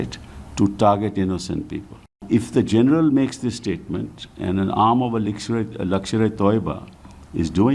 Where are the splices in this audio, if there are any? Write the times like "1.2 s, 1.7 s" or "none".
2.2 s